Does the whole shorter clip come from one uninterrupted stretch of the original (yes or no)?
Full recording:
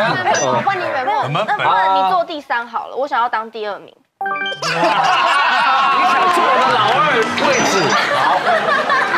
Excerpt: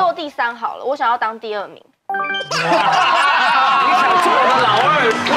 yes